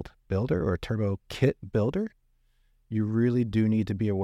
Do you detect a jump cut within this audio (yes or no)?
no